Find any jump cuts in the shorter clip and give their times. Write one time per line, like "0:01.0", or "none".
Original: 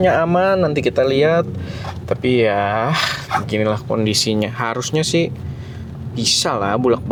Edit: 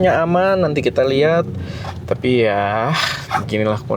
none